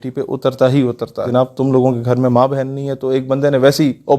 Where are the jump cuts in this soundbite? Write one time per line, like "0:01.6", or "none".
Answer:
0:01.2